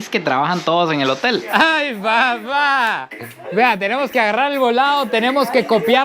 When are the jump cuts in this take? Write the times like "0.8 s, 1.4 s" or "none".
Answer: 1.4 s